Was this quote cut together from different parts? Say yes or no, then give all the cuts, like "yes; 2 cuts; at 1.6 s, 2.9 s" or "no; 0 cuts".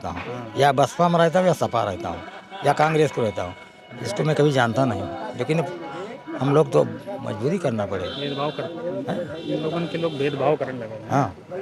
no; 0 cuts